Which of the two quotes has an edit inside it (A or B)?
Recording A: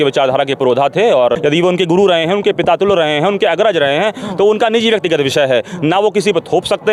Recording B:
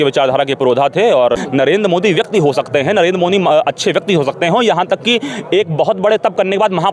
B